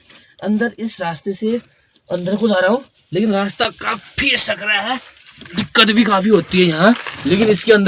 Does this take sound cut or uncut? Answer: uncut